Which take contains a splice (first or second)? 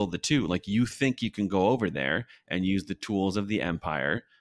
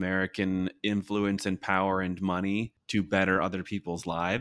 second